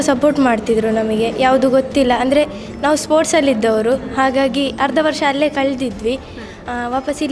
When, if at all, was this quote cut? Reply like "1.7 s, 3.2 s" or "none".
none